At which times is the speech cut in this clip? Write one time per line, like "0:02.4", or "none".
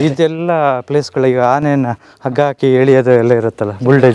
none